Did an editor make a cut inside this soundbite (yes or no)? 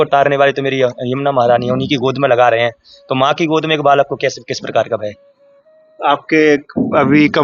no